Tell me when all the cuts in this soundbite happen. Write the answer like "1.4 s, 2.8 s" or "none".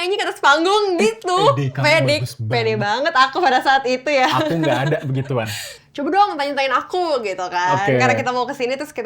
5.7 s